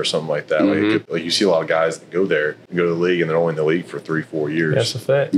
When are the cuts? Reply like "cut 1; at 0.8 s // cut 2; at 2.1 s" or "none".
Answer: cut 1; at 1.1 s // cut 2; at 2.6 s